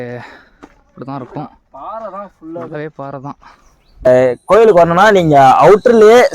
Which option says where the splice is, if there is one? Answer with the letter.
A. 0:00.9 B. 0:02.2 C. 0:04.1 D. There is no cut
C